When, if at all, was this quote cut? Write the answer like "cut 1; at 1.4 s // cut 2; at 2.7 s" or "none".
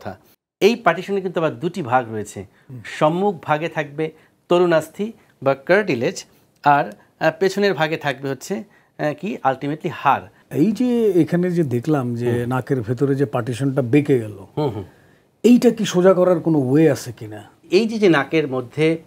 cut 1; at 10.4 s // cut 2; at 17.7 s